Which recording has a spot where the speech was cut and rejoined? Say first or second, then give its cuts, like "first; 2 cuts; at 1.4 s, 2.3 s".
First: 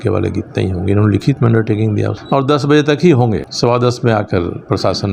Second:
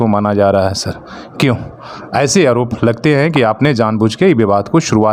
first; 2 cuts; at 2.2 s, 3.5 s